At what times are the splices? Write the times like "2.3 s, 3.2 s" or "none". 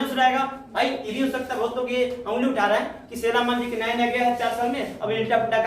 1.1 s